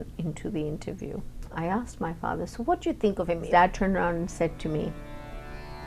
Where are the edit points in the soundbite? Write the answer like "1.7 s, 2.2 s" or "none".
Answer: 1.5 s, 3.5 s